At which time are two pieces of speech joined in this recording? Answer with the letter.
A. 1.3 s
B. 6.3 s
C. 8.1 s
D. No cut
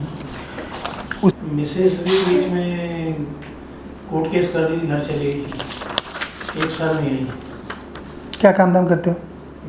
A